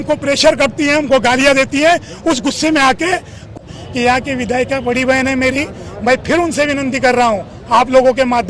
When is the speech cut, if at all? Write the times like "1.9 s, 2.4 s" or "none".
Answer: 3.7 s